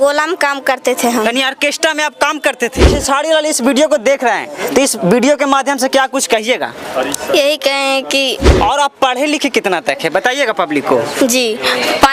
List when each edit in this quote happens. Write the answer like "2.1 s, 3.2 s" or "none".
2.9 s, 8.5 s

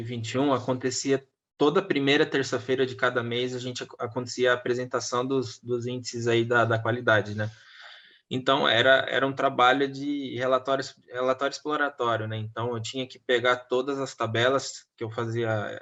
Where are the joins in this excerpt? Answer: none

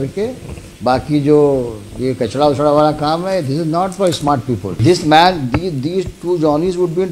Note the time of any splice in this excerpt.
4.8 s

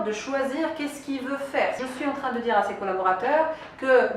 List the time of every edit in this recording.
1.8 s

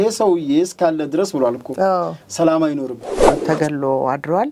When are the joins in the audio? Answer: 3.0 s

